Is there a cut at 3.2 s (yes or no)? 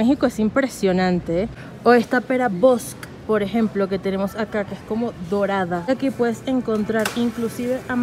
no